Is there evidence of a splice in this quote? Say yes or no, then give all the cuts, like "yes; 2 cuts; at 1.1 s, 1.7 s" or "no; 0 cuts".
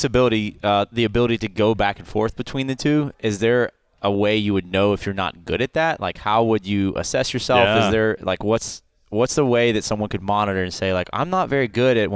no; 0 cuts